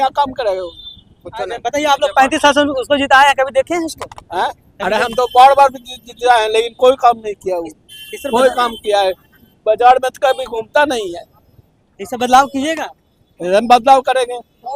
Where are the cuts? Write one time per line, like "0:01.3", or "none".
none